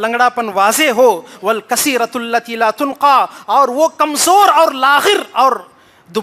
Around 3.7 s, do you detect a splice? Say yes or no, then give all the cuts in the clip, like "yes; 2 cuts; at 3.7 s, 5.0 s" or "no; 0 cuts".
no; 0 cuts